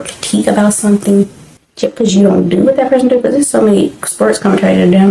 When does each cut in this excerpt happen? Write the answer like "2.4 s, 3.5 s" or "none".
none